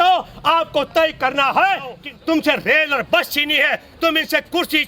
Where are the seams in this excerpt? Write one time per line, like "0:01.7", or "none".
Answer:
0:02.0